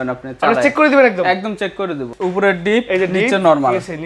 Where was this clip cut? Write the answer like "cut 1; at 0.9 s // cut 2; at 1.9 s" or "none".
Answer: cut 1; at 2.1 s

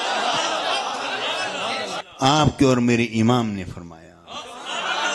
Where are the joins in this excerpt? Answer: cut 1; at 2.0 s

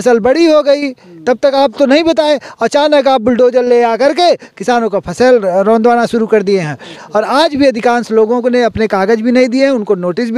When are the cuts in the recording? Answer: none

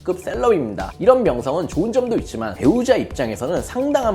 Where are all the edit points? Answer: cut 1; at 2.5 s

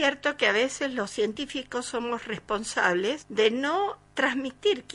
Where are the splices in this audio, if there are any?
cut 1; at 3.2 s // cut 2; at 4.0 s

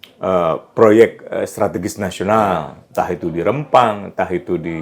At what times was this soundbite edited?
none

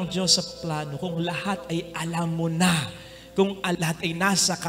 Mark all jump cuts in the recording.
cut 1; at 3.8 s

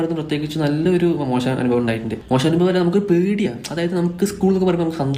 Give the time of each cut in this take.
none

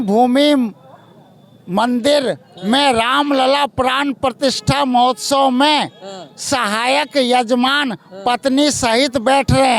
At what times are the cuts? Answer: none

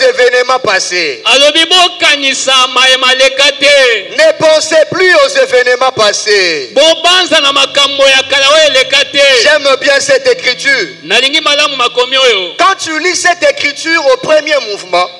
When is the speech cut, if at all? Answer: none

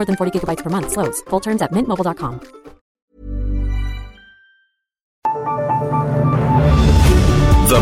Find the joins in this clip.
cut 1; at 3.0 s // cut 2; at 5.0 s

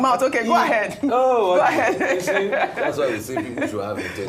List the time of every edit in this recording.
none

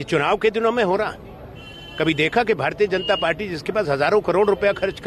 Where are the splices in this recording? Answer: none

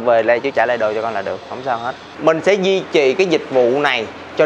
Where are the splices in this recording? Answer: cut 1; at 2.1 s

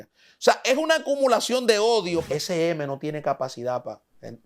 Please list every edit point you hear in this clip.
cut 1; at 2.2 s

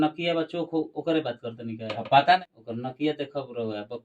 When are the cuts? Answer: cut 1; at 2.4 s

